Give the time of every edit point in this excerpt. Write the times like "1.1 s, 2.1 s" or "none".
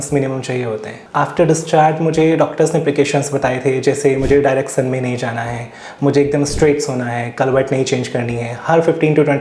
none